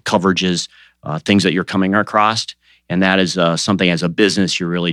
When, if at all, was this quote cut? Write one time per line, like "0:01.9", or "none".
none